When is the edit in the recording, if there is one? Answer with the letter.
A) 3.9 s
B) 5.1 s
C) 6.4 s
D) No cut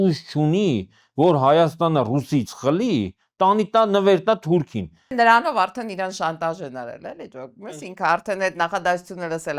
B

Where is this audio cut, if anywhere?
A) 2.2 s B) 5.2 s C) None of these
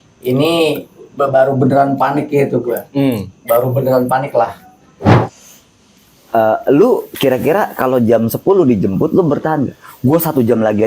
B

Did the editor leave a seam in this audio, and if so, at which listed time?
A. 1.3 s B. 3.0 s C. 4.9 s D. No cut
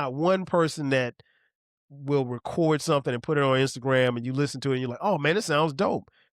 D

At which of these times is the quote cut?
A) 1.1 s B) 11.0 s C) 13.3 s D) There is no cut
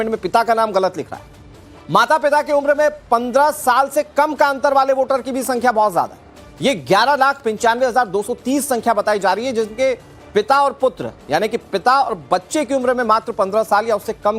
D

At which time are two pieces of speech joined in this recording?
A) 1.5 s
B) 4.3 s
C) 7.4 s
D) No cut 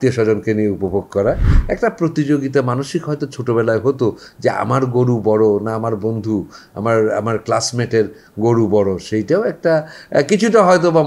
A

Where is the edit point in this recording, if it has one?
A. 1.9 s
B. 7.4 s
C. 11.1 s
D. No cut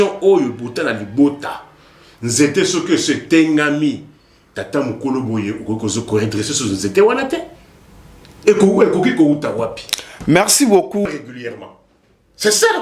C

